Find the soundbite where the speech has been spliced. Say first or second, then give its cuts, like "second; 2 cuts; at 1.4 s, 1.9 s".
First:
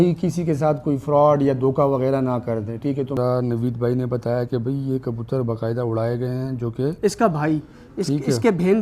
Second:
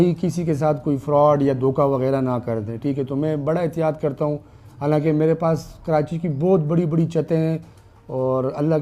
first; 1 cut; at 3.2 s